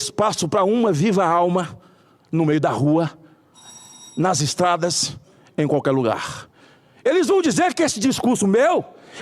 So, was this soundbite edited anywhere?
no; 0 cuts

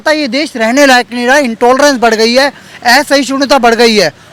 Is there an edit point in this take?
no; 0 cuts

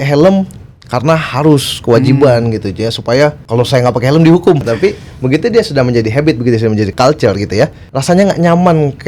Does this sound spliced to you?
yes; 4 cuts; at 3.4 s, 4.6 s, 6.9 s, 7.9 s

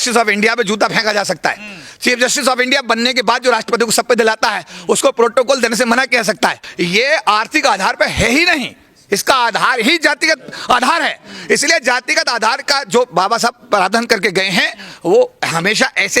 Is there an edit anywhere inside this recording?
yes; 1 cut; at 6.6 s

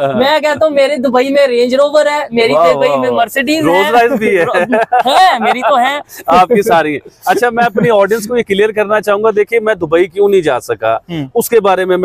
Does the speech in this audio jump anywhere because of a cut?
no; 0 cuts

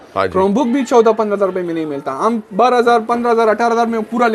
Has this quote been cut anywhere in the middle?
no; 0 cuts

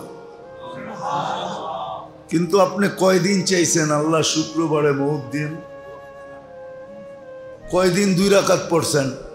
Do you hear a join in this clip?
yes; 2 cuts; at 5.6 s, 7.7 s

